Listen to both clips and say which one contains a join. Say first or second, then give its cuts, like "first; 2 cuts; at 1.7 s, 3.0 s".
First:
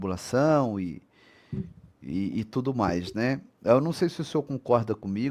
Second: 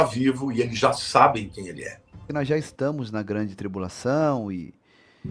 second; 1 cut; at 2.2 s